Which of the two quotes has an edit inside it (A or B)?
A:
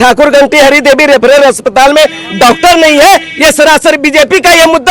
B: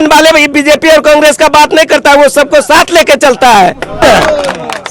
B